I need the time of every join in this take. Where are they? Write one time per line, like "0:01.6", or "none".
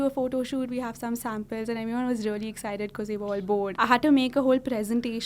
0:03.7